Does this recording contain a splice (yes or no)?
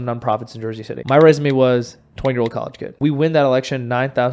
yes